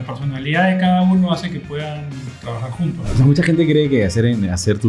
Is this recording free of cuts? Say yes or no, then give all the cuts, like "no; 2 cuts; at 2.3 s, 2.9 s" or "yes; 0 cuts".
no; 1 cut; at 3.1 s